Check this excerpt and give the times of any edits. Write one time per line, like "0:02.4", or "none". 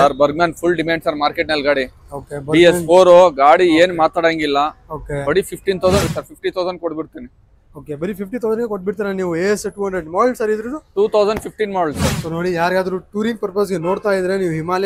0:06.0
0:12.1